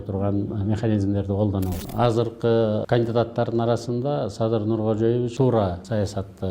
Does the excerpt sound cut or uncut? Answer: cut